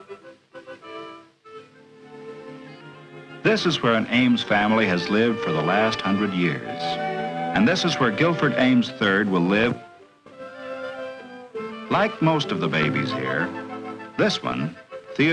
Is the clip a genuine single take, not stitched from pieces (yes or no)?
no